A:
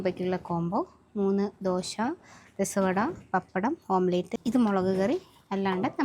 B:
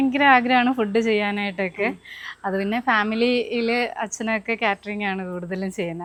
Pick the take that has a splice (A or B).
A